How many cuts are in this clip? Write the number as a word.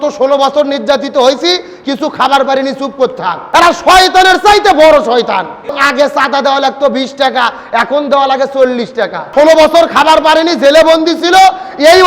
three